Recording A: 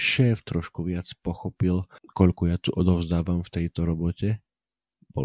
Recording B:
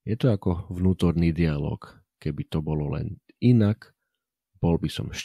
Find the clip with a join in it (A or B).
A